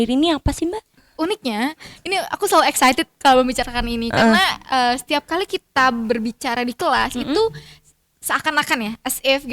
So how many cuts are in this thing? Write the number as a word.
one